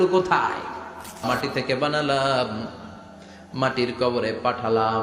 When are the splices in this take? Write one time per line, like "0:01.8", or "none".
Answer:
0:01.2